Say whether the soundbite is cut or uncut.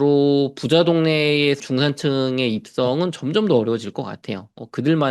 cut